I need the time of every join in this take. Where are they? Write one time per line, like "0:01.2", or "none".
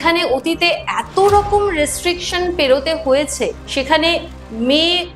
0:03.6